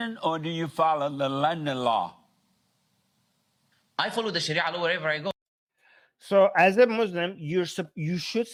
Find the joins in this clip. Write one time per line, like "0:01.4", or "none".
none